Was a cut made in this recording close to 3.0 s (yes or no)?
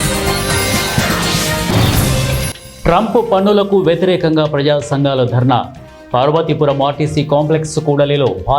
no